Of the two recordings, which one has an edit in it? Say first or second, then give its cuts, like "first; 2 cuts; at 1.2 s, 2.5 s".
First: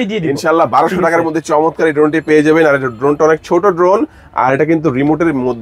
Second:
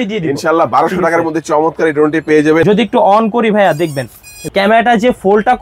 second; 2 cuts; at 2.6 s, 4.4 s